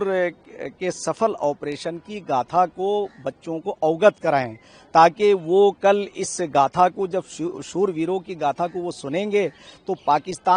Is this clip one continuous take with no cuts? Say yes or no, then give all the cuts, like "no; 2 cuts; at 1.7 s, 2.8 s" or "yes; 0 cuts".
yes; 0 cuts